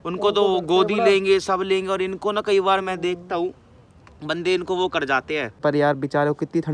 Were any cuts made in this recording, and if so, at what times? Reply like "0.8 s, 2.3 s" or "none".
5.5 s